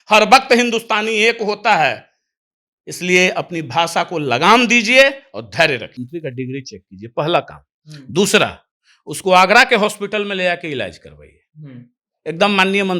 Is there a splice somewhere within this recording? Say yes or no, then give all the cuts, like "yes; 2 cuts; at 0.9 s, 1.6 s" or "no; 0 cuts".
yes; 1 cut; at 5.9 s